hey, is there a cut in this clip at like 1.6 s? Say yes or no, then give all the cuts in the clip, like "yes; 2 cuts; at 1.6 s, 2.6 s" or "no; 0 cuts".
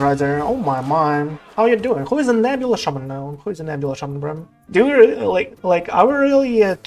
no; 1 cut; at 4.5 s